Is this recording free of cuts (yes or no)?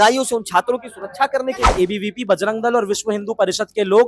no